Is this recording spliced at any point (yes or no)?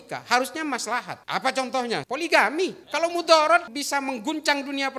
yes